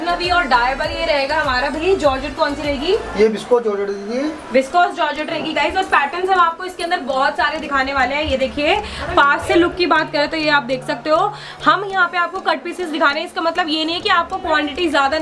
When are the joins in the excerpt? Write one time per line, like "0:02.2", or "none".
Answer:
none